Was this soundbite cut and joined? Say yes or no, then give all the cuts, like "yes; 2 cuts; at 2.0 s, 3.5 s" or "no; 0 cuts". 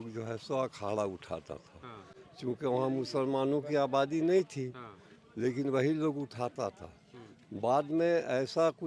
no; 0 cuts